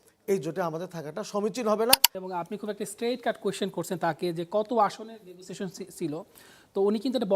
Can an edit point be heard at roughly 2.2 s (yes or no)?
yes